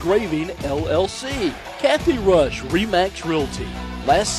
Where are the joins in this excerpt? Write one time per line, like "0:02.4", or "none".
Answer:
0:01.7